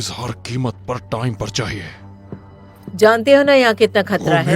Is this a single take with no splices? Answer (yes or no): yes